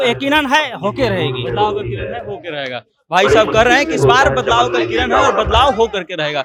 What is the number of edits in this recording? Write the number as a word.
zero